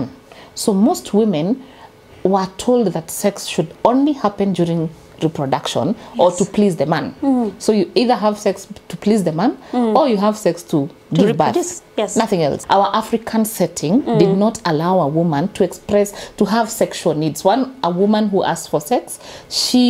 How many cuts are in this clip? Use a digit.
1